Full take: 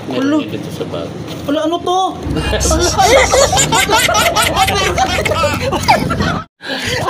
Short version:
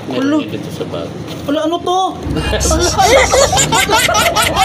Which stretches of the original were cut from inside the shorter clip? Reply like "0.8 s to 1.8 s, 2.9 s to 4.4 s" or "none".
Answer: none